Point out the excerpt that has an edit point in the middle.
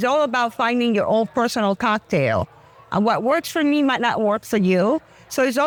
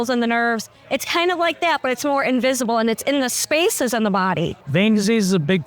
second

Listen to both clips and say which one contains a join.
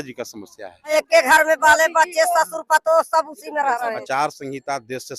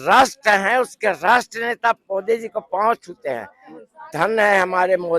first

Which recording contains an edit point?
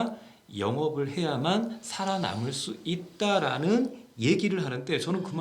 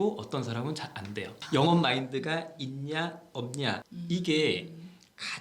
second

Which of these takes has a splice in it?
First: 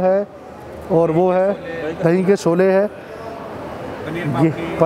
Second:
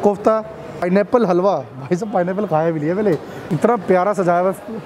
second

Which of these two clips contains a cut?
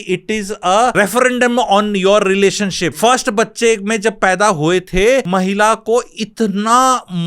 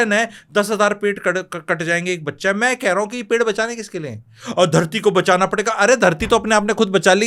first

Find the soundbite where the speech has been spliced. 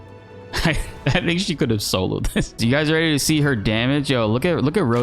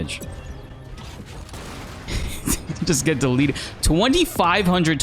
first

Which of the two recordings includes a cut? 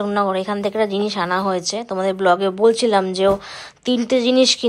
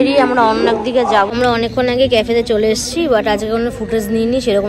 second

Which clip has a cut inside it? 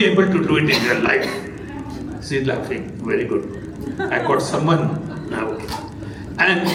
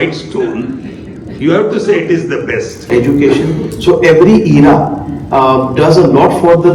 second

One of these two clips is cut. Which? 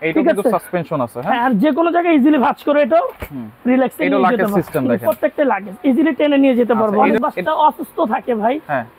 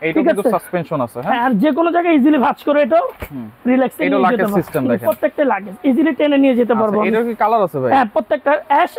first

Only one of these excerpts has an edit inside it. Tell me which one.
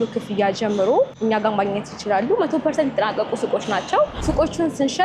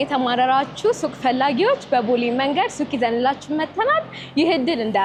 first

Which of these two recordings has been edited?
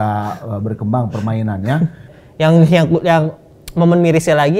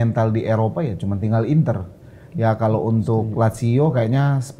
first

